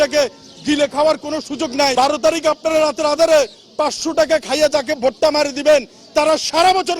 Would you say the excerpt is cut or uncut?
cut